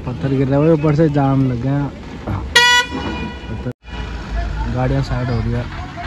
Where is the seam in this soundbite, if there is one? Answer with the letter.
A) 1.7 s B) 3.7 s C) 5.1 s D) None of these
B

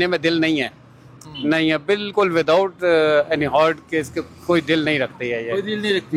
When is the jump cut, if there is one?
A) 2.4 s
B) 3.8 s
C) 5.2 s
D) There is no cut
D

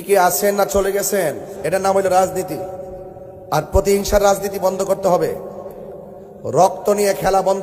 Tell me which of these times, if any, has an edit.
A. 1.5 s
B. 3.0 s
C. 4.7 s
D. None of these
A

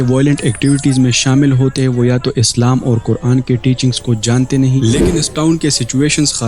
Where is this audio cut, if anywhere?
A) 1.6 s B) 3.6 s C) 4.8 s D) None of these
C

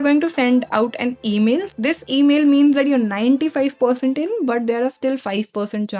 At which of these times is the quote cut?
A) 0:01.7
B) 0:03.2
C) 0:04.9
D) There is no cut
A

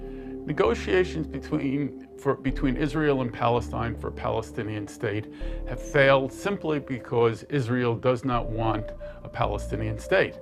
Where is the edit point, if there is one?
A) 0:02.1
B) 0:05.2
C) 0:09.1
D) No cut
A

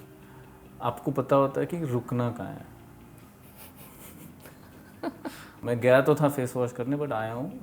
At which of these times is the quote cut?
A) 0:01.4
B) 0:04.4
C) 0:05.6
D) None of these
C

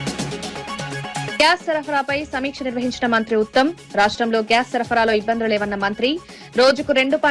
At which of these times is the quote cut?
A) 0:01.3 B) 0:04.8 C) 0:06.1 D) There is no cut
A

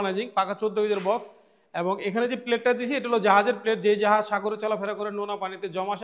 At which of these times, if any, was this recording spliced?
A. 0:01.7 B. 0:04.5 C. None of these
C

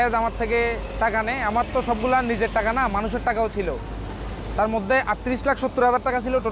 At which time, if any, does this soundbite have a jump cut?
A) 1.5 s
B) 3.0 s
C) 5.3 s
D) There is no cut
D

